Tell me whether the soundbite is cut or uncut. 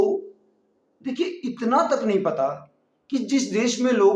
cut